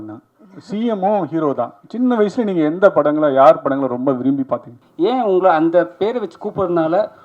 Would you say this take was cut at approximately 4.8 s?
yes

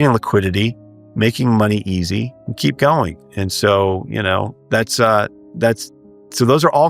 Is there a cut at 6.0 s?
no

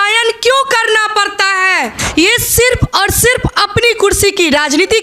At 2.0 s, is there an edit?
yes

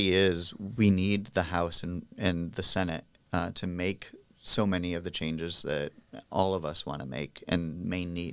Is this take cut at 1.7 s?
no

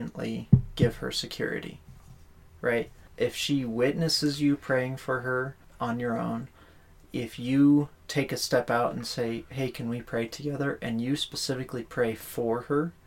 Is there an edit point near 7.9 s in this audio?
no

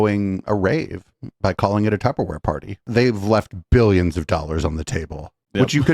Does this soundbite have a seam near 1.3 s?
no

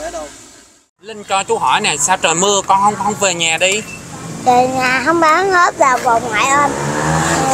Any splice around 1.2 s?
yes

